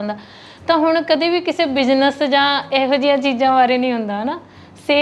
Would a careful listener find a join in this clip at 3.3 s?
no; 0 cuts

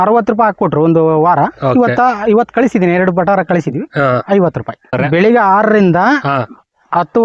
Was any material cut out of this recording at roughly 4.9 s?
yes; 1 cut; at 4.9 s

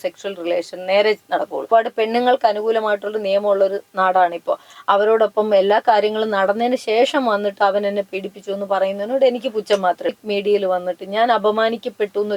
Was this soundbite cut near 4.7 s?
yes; 3 cuts; at 1.7 s, 4.7 s, 10.1 s

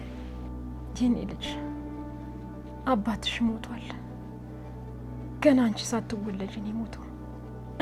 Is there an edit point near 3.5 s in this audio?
no; 0 cuts

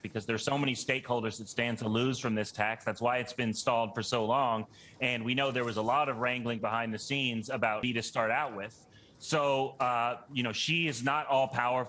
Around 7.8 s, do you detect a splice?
yes; 1 cut; at 7.8 s

